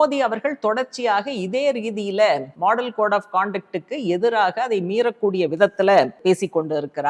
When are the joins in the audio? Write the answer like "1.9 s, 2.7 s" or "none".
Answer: 2.5 s, 6.2 s